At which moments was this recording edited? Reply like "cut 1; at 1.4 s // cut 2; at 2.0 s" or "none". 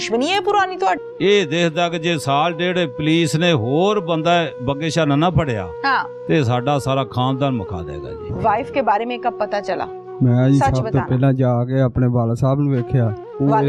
none